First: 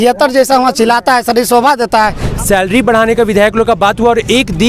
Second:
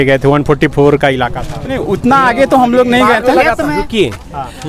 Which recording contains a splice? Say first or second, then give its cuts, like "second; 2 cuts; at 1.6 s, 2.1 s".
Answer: first; 1 cut; at 2.2 s